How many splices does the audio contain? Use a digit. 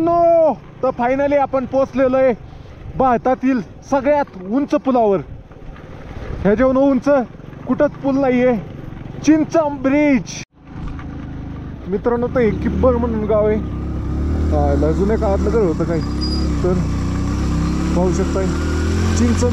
1